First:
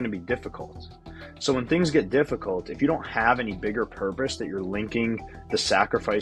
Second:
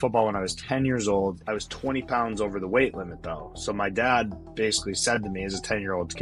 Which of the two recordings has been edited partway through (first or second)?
second